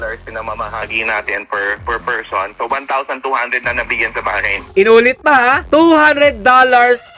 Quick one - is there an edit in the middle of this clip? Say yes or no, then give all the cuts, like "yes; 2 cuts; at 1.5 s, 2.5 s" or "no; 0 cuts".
yes; 1 cut; at 4.6 s